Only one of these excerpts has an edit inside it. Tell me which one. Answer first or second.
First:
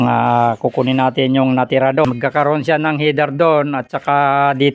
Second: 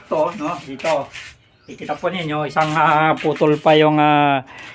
first